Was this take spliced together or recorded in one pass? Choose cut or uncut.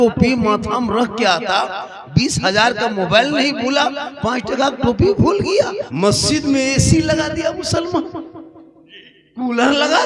cut